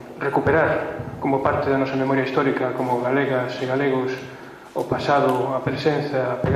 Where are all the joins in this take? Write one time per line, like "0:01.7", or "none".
none